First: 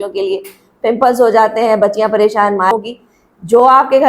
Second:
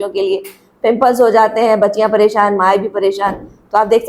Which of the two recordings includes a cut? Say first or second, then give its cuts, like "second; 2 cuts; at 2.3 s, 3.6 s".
first; 1 cut; at 2.7 s